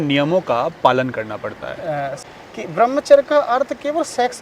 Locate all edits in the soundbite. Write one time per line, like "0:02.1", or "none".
0:02.1